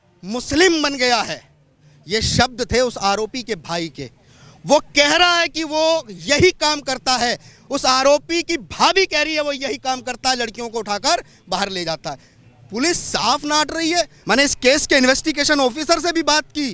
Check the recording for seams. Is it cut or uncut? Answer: cut